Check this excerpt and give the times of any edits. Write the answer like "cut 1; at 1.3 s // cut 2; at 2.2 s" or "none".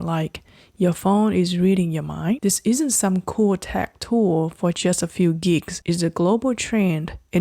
cut 1; at 2.4 s // cut 2; at 5.7 s